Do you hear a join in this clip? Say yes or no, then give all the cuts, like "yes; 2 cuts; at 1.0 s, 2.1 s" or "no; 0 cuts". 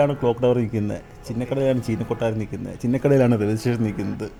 no; 0 cuts